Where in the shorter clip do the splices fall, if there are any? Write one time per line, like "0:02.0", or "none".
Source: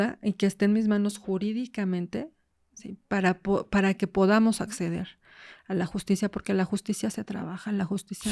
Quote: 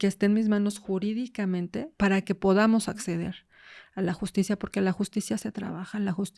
0:01.9